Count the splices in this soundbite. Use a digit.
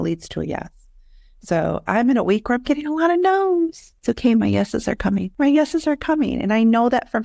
2